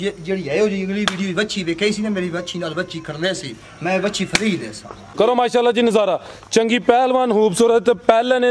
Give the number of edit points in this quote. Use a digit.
1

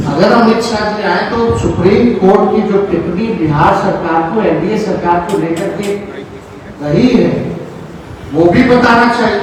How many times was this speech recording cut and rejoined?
0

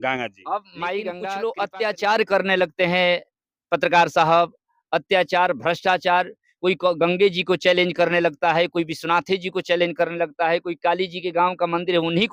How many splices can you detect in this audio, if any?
1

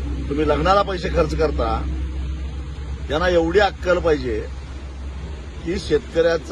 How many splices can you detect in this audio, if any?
0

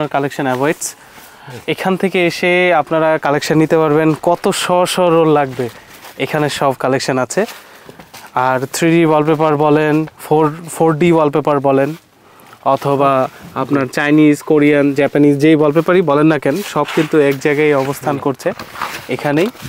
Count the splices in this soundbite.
0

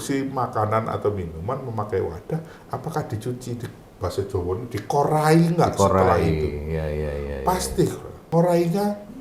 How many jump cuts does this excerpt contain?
1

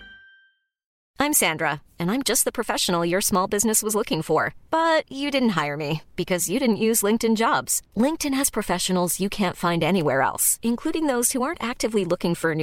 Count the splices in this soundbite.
1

